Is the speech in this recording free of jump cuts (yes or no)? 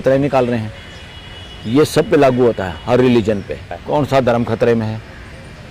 no